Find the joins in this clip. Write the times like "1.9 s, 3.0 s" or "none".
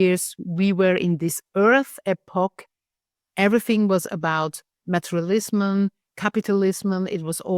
none